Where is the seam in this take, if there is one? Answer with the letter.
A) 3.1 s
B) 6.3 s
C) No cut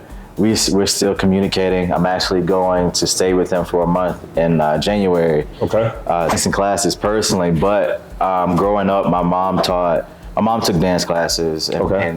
B